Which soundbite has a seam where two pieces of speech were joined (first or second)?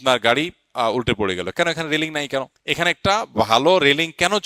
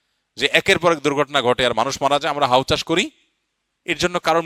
first